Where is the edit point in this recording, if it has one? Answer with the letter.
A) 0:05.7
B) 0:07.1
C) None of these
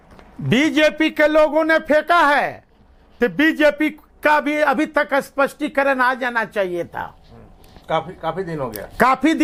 C